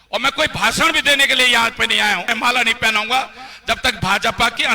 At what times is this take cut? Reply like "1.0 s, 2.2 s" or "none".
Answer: 2.3 s